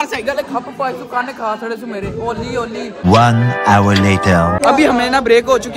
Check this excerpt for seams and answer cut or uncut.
uncut